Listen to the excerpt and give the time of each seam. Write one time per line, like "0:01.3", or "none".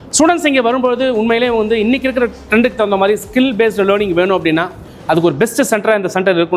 none